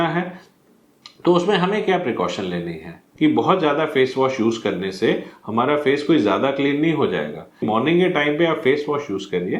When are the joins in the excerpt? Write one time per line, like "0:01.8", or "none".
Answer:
0:03.0
0:07.7